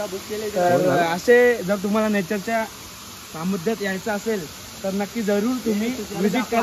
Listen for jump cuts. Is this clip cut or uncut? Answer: uncut